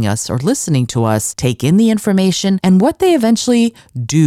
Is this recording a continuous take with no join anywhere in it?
no; 2 cuts; at 1.3 s, 2.6 s

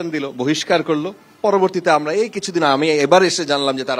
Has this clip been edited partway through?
no; 0 cuts

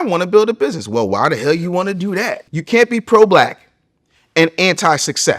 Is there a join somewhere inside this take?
yes; 1 cut; at 2.5 s

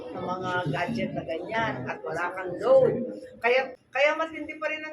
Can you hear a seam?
yes; 1 cut; at 3.5 s

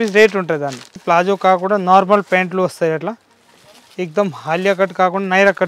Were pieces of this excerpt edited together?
yes; 1 cut; at 1.0 s

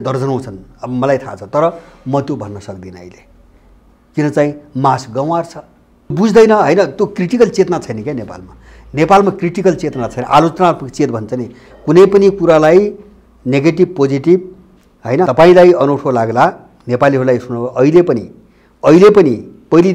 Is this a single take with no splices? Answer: no; 2 cuts; at 6.1 s, 15.3 s

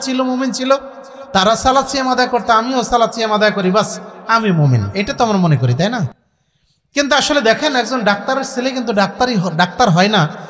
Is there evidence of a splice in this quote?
no; 0 cuts

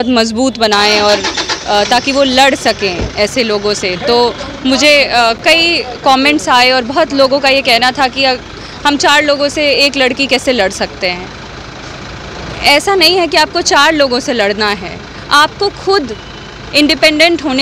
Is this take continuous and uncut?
yes; 0 cuts

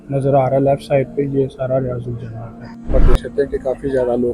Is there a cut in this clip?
yes; 1 cut; at 2.9 s

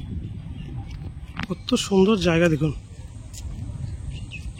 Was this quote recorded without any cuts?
yes; 0 cuts

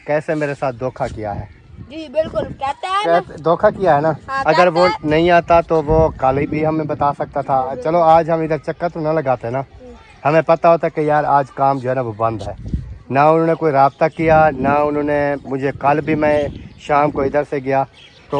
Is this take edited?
no; 0 cuts

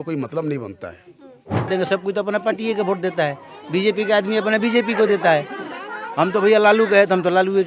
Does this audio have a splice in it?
yes; 1 cut; at 1.7 s

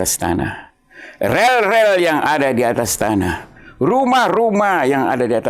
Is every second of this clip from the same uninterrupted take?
yes; 0 cuts

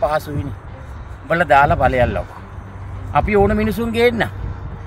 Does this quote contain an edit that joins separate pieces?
no; 0 cuts

